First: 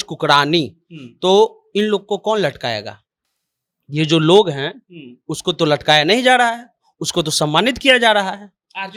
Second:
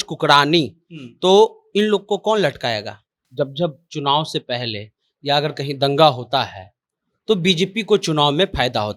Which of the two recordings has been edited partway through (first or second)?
second